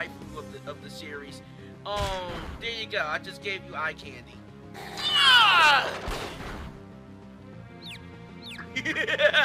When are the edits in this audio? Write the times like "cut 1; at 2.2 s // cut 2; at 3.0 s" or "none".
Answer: cut 1; at 4.4 s